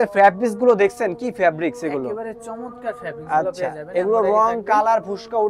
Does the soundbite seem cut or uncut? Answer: uncut